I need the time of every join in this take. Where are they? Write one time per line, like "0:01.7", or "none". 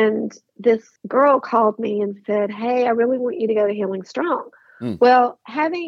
0:01.0